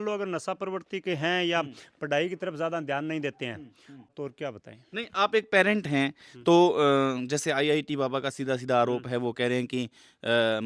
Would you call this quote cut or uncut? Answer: cut